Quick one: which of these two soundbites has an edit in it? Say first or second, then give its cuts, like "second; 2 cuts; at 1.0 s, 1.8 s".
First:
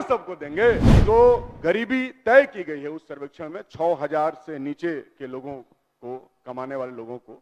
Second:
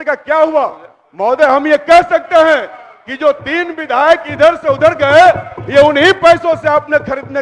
first; 1 cut; at 0.9 s